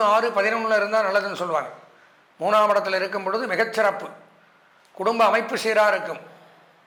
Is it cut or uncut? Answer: uncut